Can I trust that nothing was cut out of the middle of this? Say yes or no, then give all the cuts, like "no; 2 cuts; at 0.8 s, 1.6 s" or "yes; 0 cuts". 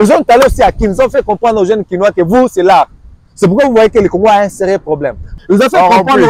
no; 1 cut; at 5.3 s